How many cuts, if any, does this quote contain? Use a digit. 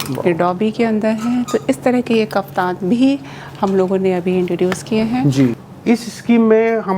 1